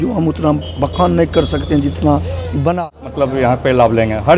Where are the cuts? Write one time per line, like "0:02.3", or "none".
0:03.0